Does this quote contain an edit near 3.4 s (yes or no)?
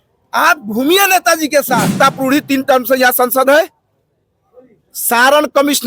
no